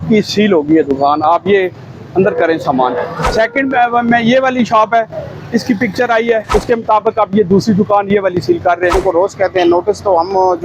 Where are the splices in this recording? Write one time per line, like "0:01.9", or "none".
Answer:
0:03.2
0:06.4
0:09.0